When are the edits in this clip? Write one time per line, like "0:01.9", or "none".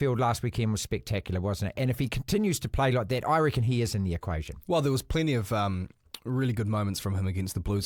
none

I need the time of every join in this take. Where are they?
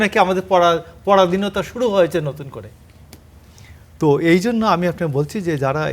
none

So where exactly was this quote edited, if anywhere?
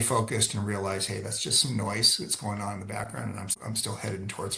0:03.5

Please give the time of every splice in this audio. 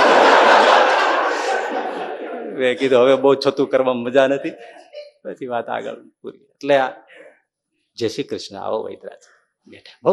none

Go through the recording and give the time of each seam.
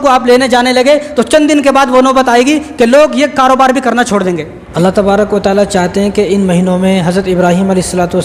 0:04.6

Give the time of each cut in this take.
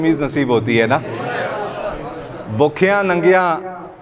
none

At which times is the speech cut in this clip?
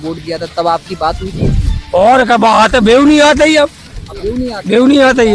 none

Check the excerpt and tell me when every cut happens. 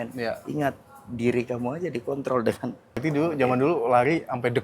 0:03.0

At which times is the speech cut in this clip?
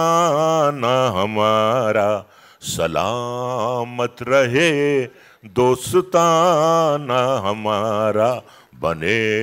none

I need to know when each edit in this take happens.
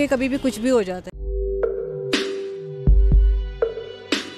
0:01.1

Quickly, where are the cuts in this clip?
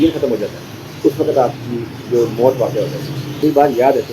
0:03.2

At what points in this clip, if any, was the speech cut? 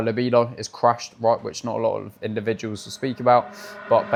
none

